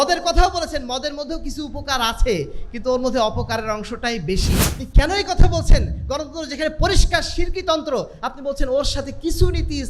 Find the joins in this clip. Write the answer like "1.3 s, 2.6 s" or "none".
4.9 s